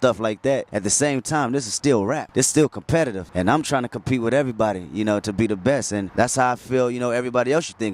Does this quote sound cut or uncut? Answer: uncut